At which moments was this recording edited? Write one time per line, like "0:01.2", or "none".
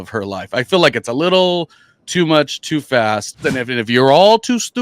0:03.5